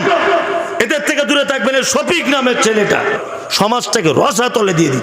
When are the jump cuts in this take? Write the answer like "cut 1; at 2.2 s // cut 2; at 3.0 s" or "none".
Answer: cut 1; at 3.2 s